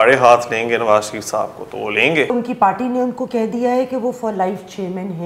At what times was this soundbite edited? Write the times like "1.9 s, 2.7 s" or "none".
2.3 s